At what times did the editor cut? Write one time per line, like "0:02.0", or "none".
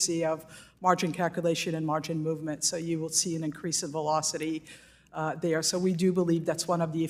none